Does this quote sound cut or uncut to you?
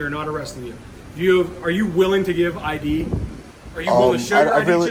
uncut